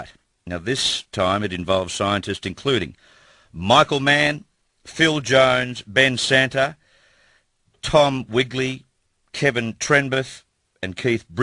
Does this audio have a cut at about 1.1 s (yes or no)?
no